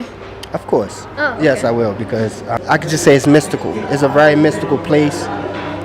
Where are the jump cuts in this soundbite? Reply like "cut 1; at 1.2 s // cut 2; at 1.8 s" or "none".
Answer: cut 1; at 2.5 s